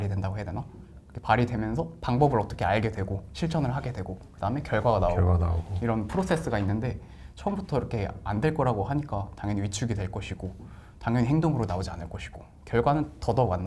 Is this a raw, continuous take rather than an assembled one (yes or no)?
yes